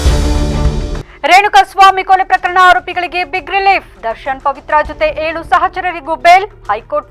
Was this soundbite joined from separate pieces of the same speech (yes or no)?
yes